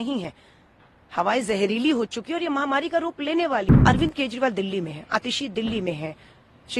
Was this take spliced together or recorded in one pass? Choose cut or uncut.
cut